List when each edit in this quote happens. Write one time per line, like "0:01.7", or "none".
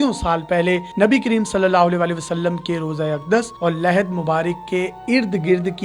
none